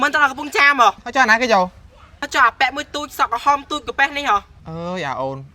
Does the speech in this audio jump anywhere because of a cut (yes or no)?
yes